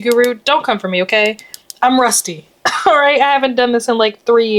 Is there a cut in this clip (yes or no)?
no